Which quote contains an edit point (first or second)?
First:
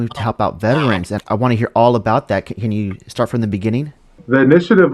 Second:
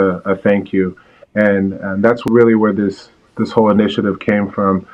first